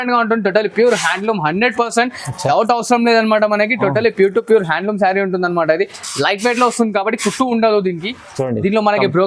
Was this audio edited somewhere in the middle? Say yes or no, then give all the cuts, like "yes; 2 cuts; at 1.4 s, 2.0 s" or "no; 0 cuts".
no; 0 cuts